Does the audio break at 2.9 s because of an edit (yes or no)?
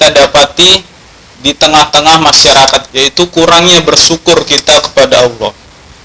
yes